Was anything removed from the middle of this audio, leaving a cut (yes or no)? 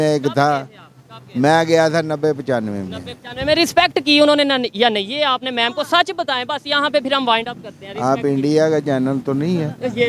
no